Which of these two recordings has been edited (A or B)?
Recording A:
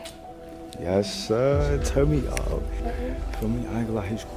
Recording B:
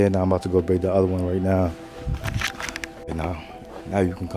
A